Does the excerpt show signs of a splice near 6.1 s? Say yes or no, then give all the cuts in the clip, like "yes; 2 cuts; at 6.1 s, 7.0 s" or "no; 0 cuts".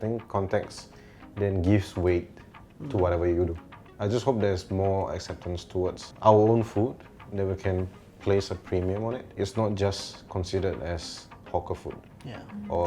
yes; 3 cuts; at 3.8 s, 6.1 s, 9.3 s